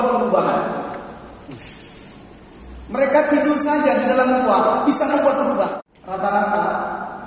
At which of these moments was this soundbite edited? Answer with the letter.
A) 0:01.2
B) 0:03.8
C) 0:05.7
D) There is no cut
C